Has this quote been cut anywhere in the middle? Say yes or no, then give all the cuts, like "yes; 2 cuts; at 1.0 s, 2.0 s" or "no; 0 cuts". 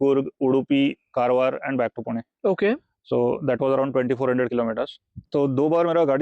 yes; 1 cut; at 5.2 s